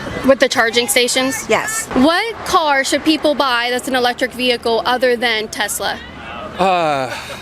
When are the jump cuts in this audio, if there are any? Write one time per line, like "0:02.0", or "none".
0:01.8

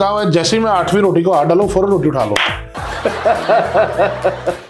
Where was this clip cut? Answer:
none

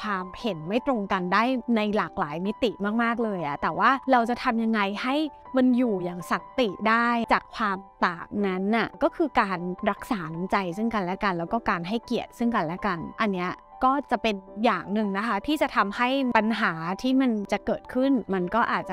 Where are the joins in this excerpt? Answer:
none

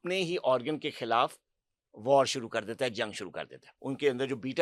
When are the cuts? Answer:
0:03.7

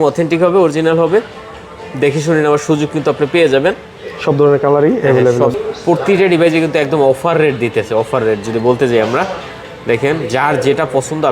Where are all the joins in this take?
0:05.5

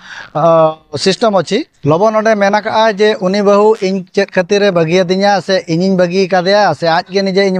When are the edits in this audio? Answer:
0:01.3

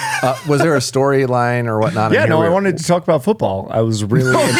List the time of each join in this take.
none

